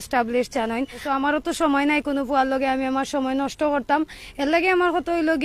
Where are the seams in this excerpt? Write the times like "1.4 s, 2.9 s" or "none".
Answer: 1.0 s